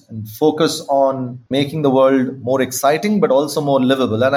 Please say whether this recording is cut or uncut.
cut